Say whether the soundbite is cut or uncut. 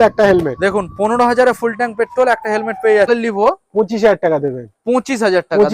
cut